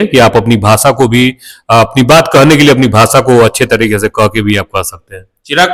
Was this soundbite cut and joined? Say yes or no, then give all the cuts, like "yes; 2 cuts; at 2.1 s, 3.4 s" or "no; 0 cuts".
no; 0 cuts